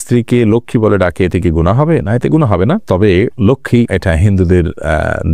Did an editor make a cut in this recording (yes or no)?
no